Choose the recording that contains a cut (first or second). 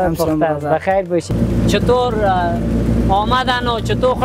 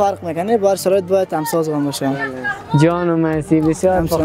first